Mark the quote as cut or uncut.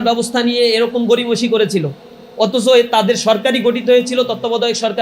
uncut